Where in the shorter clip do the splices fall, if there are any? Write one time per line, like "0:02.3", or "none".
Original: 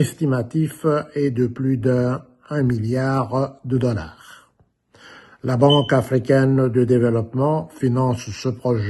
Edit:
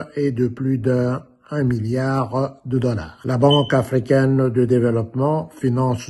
0:03.1